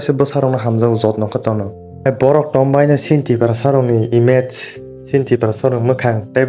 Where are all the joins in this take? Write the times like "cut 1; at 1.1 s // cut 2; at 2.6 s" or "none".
cut 1; at 2.0 s